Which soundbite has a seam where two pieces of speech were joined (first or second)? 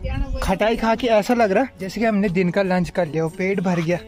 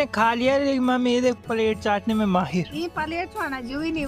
first